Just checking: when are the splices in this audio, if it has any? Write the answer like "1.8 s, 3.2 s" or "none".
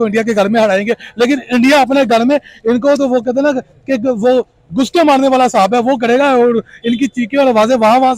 none